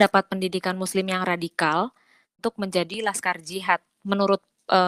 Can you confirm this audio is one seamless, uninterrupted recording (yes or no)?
no